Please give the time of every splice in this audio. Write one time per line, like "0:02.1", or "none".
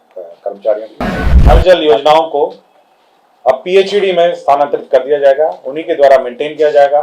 0:01.5